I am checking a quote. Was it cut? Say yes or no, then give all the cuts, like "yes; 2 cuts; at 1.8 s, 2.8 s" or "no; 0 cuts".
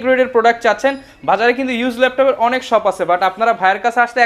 no; 0 cuts